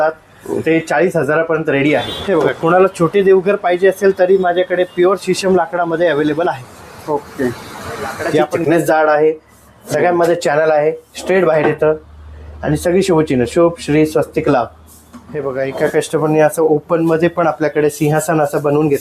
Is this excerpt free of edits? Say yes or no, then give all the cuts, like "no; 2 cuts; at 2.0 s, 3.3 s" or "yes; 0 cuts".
no; 3 cuts; at 2.1 s, 8.6 s, 15.5 s